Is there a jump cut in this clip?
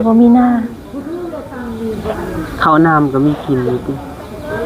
no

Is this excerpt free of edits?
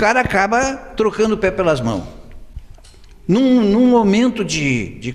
yes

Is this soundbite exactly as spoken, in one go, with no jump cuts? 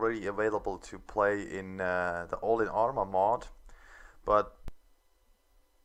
yes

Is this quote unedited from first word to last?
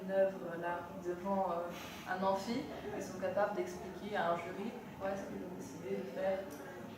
yes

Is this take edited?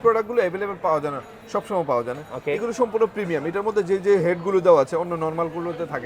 no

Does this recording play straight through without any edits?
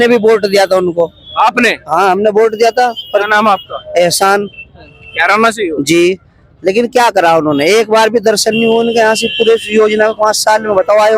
yes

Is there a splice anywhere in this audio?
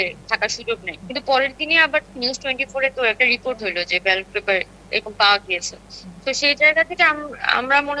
no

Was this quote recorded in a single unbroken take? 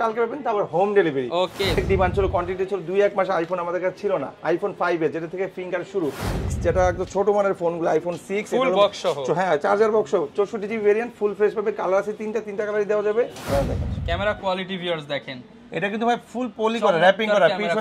no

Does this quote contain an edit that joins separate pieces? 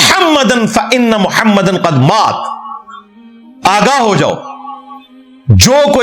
no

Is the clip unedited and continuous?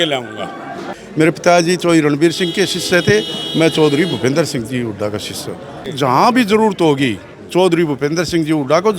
no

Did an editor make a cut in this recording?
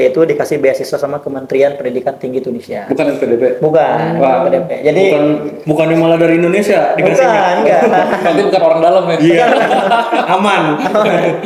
no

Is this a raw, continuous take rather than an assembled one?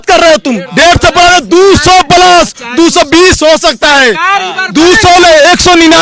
yes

